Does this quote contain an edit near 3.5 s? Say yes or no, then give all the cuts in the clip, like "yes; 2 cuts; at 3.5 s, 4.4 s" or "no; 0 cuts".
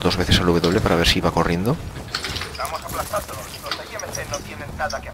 no; 1 cut; at 1.9 s